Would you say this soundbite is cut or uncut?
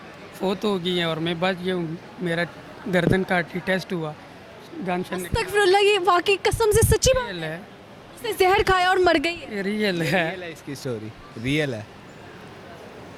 uncut